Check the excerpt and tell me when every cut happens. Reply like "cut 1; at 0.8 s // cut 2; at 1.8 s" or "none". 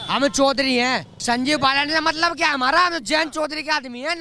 cut 1; at 1.1 s